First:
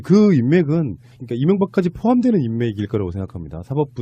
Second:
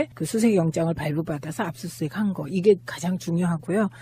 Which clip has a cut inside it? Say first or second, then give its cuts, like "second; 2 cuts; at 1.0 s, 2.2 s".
second; 1 cut; at 2.5 s